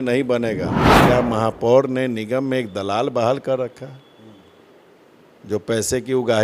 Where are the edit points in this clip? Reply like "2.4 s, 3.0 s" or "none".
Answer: 1.0 s